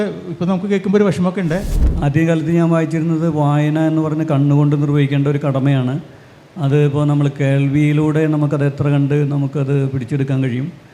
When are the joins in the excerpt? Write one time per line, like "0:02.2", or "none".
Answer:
0:01.7